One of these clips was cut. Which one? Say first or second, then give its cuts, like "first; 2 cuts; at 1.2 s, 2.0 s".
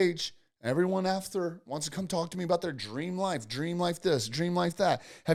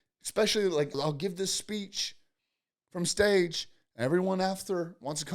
second; 1 cut; at 0.9 s